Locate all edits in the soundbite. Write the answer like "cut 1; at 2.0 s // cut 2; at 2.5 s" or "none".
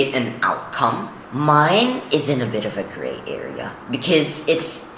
cut 1; at 1.2 s